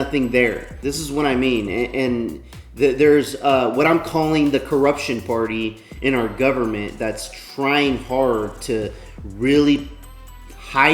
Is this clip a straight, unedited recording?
yes; 0 cuts

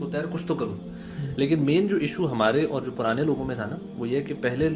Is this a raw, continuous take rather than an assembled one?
yes; 0 cuts

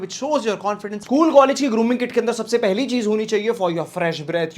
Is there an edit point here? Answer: yes; 1 cut; at 1.0 s

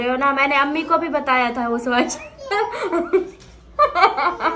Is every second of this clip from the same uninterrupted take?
yes; 0 cuts

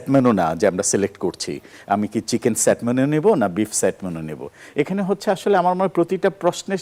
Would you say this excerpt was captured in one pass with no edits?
yes; 0 cuts

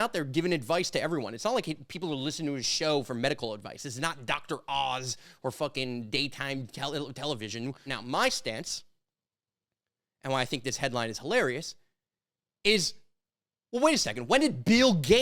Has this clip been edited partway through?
yes; 1 cut; at 7.9 s

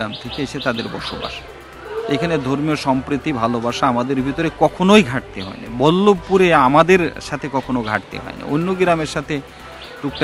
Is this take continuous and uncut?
yes; 0 cuts

